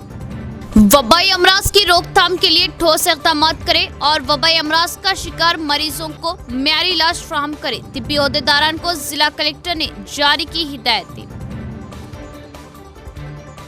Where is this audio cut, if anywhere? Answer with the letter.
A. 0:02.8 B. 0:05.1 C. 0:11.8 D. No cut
D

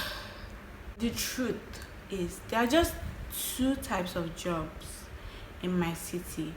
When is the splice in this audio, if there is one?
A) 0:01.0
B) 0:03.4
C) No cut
A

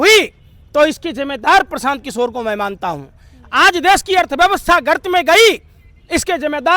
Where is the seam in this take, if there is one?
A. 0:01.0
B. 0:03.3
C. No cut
C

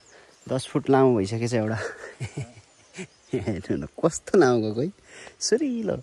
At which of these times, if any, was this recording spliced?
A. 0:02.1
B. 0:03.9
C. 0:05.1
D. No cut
D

